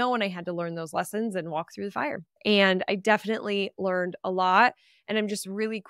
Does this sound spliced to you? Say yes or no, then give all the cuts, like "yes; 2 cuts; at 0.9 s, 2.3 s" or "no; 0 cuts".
yes; 1 cut; at 2.3 s